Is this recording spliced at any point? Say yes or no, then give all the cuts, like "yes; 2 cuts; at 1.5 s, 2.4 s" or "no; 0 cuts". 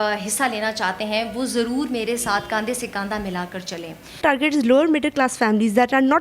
yes; 1 cut; at 4.2 s